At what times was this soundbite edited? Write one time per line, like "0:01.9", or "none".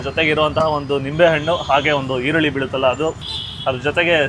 0:03.2